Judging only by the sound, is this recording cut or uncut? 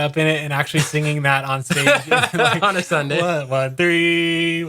uncut